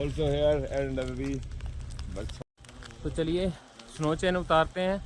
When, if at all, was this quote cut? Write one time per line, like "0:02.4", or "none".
0:02.4